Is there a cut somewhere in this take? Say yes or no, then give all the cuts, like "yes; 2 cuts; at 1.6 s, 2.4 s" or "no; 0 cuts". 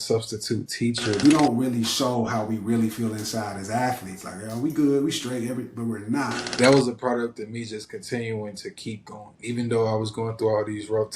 yes; 3 cuts; at 1.2 s, 6.4 s, 9.3 s